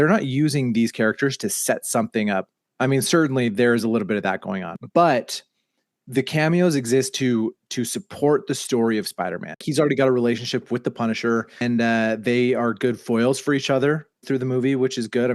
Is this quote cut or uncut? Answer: cut